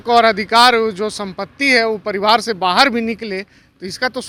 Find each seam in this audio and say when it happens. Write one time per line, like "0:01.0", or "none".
none

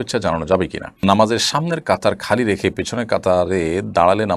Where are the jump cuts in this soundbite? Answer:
0:00.9

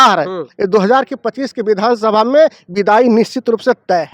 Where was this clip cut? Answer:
none

